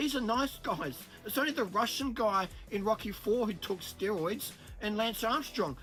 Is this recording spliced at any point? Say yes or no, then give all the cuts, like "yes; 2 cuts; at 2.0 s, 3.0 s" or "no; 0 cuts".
no; 0 cuts